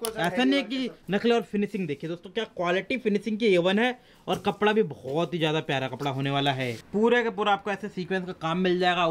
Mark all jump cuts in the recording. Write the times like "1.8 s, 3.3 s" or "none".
6.7 s